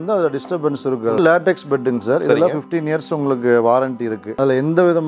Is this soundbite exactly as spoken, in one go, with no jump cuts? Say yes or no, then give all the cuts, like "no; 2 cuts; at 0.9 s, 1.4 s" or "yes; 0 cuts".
no; 2 cuts; at 1.2 s, 4.3 s